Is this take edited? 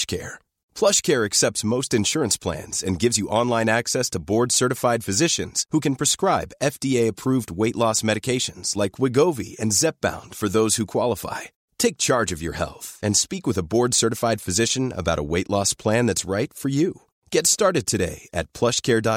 no; 0 cuts

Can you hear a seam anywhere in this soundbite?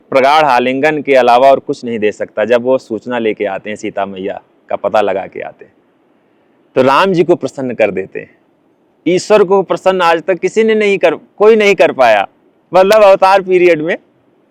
no; 0 cuts

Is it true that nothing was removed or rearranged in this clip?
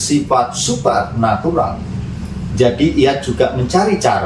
yes; 0 cuts

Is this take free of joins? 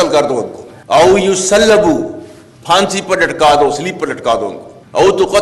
yes; 0 cuts

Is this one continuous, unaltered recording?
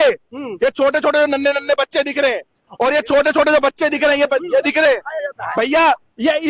yes; 0 cuts

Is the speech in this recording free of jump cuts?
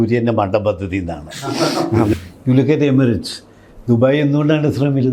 no; 1 cut; at 2.1 s

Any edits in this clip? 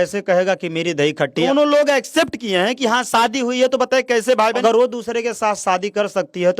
yes; 2 cuts; at 1.4 s, 4.6 s

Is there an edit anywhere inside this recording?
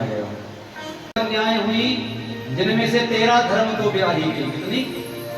yes; 1 cut; at 1.0 s

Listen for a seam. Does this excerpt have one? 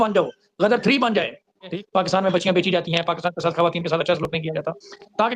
yes; 1 cut; at 1.7 s

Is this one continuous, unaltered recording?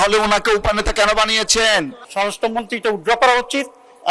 no; 1 cut; at 2.0 s

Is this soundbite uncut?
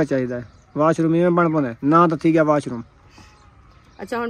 no; 1 cut; at 1.7 s

